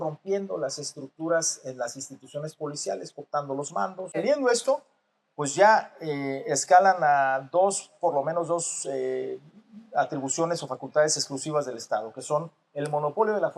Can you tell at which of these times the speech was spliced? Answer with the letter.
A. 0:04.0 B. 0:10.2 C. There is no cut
A